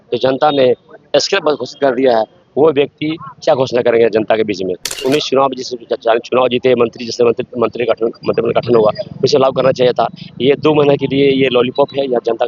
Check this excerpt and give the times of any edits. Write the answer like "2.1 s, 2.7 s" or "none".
4.9 s